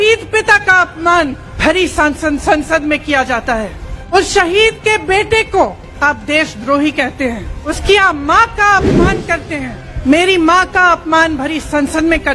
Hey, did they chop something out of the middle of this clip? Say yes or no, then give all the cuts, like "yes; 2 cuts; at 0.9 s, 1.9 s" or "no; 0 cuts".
yes; 5 cuts; at 1.5 s, 4.1 s, 5.9 s, 7.6 s, 9.8 s